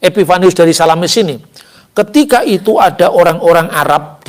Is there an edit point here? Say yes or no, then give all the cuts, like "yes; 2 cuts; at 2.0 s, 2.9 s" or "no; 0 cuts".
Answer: no; 0 cuts